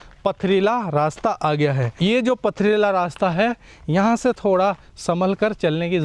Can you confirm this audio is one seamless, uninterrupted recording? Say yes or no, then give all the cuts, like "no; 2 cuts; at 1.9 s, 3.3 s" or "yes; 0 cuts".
no; 1 cut; at 2.0 s